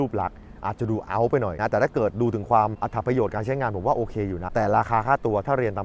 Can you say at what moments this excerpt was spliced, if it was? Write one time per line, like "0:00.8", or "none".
0:01.5
0:02.8
0:04.4